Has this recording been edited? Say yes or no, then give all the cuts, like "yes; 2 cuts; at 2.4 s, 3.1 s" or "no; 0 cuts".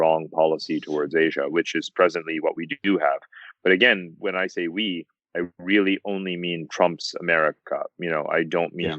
yes; 1 cut; at 4.2 s